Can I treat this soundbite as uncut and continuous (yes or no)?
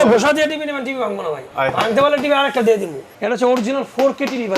no